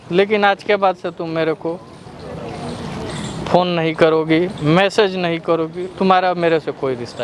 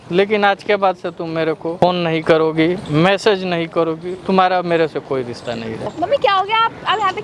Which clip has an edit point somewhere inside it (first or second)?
second